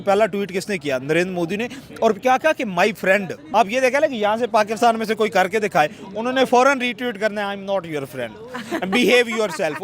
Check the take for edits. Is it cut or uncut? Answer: cut